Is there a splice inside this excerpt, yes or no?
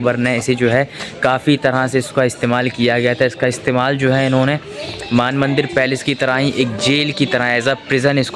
no